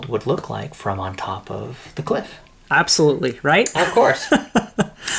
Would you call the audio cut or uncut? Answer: uncut